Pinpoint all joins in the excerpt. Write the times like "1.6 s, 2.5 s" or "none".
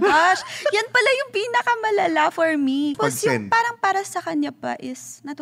2.9 s